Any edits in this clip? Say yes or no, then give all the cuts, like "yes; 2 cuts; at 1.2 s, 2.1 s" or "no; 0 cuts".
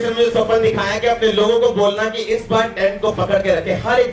no; 0 cuts